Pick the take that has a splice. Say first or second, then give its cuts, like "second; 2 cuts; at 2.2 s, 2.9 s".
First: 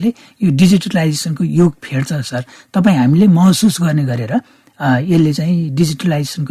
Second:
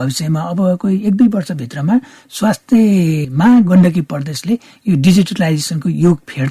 second; 1 cut; at 3.2 s